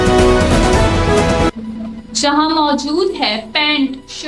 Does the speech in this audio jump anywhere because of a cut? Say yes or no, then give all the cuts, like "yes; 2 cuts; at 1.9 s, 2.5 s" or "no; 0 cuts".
yes; 1 cut; at 1.5 s